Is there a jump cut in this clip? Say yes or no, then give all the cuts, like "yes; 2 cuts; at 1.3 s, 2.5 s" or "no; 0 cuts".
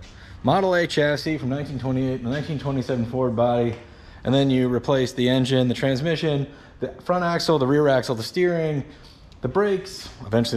no; 0 cuts